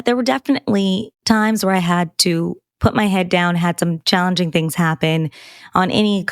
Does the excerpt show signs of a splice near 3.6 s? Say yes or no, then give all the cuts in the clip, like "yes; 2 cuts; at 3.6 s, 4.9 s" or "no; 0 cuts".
no; 1 cut; at 1.1 s